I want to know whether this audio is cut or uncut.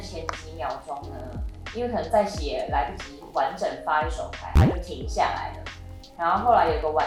uncut